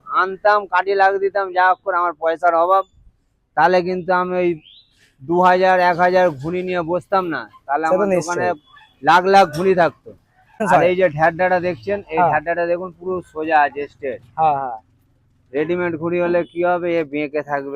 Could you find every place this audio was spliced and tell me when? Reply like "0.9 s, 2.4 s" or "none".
10.6 s